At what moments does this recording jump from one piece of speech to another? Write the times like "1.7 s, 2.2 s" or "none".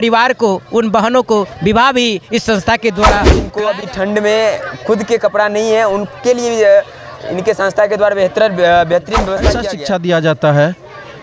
3.4 s, 9.6 s